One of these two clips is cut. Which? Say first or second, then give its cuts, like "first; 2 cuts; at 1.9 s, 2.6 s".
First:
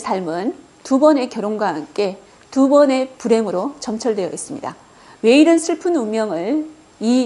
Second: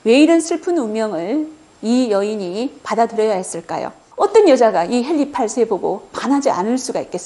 second; 1 cut; at 4.0 s